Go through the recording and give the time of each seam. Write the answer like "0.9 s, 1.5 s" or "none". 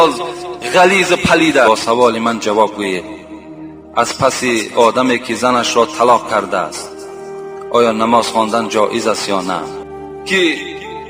1.7 s, 9.8 s